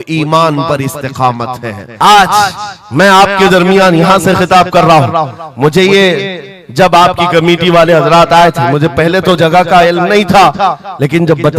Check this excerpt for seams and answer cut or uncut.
cut